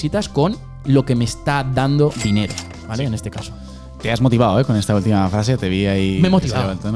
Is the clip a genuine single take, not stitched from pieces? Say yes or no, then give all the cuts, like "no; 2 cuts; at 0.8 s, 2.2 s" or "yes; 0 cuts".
yes; 0 cuts